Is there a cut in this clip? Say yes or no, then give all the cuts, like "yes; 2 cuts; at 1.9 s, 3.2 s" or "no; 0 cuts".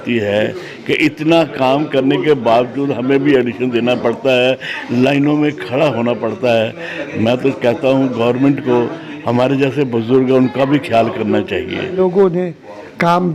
yes; 1 cut; at 11.9 s